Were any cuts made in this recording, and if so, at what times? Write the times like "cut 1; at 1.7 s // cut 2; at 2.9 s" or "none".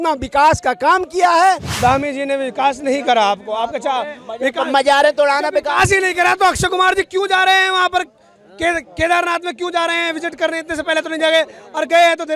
cut 1; at 1.7 s